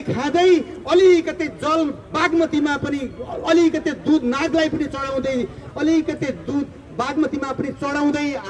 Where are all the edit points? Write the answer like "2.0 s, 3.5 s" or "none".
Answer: none

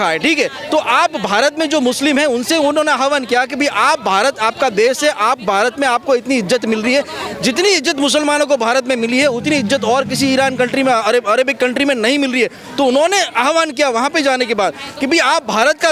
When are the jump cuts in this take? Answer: none

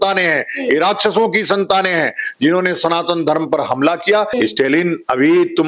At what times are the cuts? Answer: 4.3 s

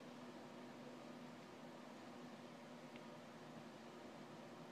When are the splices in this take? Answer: 3.6 s

